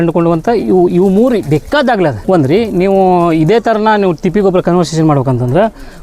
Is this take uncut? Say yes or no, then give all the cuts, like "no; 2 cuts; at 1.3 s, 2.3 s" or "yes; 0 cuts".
yes; 0 cuts